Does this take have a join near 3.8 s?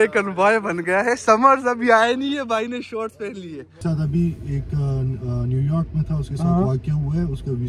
yes; 1 cut; at 3.8 s

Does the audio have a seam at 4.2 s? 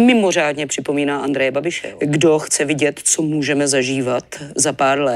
no; 1 cut; at 1.8 s

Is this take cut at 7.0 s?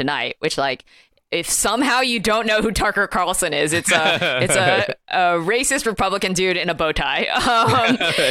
no; 0 cuts

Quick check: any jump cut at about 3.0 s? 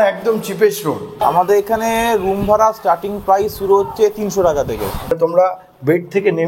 no; 2 cuts; at 1.2 s, 5.1 s

